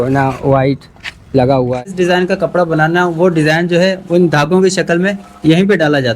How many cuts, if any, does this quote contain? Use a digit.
1